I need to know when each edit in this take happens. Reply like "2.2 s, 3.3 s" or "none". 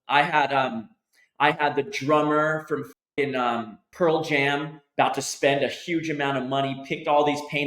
3.8 s